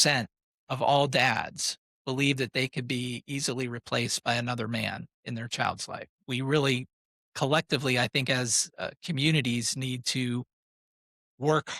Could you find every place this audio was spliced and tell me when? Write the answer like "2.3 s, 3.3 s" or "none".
6.2 s